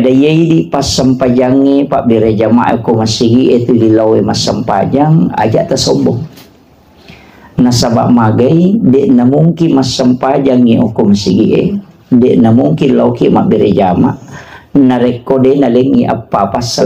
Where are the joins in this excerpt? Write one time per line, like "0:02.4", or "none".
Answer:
none